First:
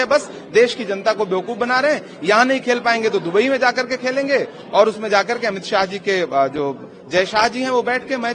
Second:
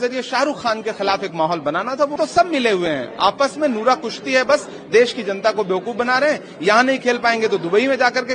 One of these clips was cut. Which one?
second; 1 cut; at 2.2 s

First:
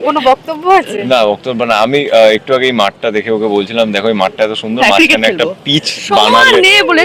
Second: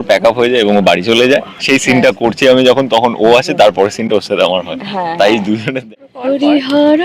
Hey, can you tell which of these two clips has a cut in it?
second; 1 cut; at 5.7 s

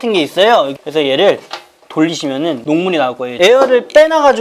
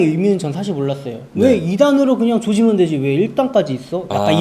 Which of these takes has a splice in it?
first; 1 cut; at 3.3 s

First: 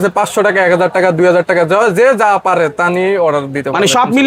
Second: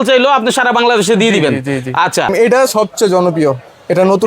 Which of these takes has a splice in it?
second; 1 cut; at 2.3 s

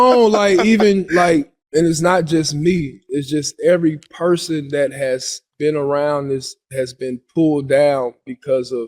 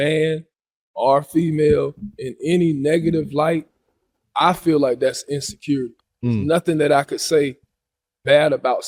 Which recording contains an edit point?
first; 1 cut; at 1.6 s

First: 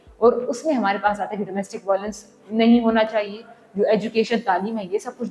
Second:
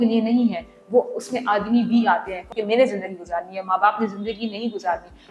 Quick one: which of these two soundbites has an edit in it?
second; 1 cut; at 2.4 s

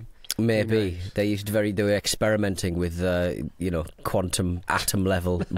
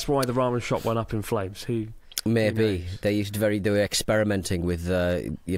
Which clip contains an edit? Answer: first; 1 cut; at 4.6 s

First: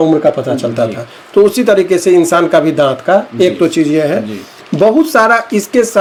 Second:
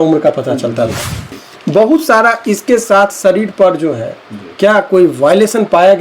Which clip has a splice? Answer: second; 1 cut; at 1.2 s

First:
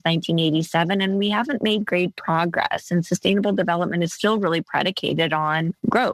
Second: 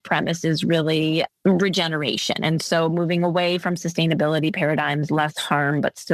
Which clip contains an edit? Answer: second; 1 cut; at 1.3 s

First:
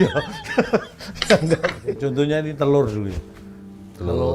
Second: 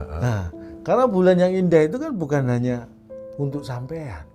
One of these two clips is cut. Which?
first; 1 cut; at 1.9 s

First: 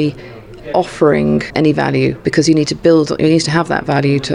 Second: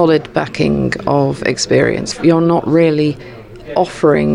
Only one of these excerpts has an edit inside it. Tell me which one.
second; 1 cut; at 2.1 s

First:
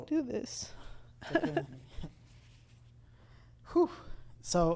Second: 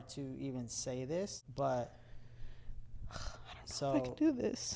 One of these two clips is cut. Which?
second; 1 cut; at 1.4 s

